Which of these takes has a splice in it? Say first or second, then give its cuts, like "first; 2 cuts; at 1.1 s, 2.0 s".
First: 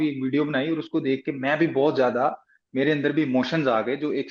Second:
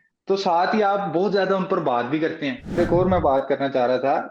second; 1 cut; at 2.8 s